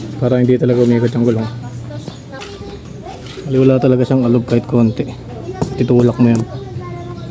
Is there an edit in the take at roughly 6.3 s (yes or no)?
no